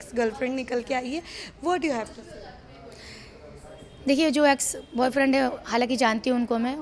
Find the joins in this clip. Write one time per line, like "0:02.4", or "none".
none